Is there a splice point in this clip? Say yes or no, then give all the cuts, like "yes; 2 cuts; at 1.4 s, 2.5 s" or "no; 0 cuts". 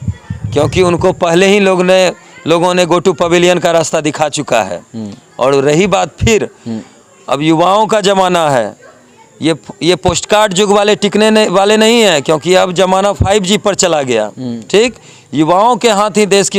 no; 0 cuts